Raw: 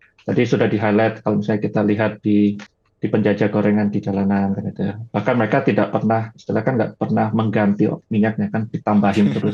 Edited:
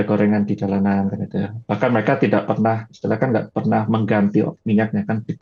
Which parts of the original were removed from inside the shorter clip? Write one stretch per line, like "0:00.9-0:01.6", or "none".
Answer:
none